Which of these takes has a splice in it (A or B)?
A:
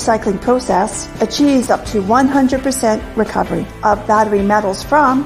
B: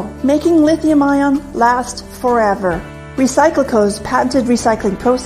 B